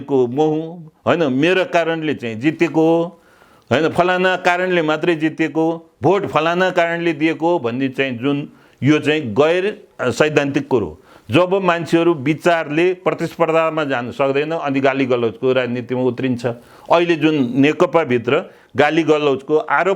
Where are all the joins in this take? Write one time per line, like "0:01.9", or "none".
none